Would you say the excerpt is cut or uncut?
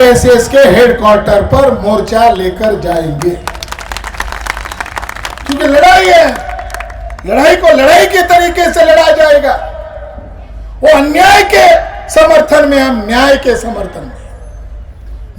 uncut